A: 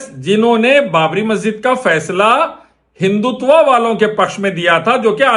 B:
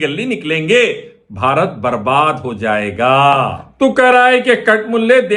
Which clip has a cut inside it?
B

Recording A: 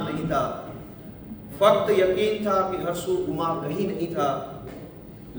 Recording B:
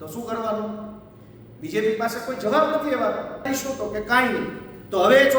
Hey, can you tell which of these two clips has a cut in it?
B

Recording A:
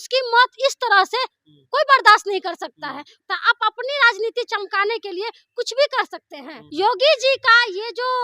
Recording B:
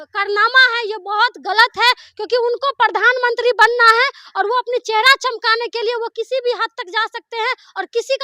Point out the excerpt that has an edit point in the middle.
A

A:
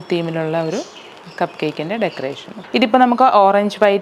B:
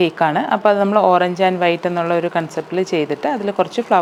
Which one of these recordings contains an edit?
A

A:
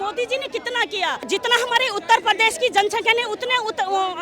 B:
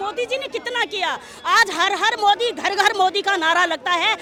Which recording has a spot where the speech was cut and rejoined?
A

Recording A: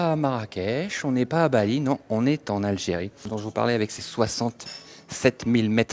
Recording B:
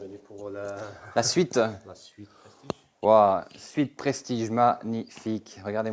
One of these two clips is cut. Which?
A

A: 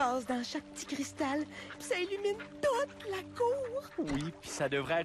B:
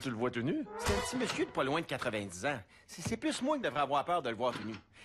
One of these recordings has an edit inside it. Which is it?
B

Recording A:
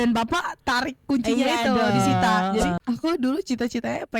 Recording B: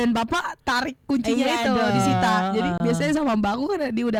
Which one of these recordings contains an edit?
A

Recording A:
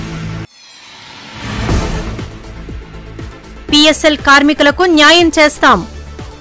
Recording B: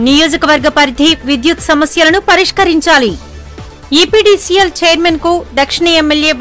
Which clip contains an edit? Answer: A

